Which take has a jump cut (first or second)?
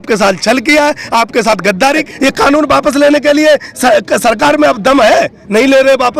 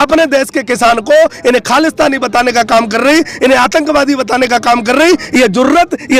first